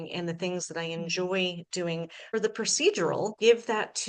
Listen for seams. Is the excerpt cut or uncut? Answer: cut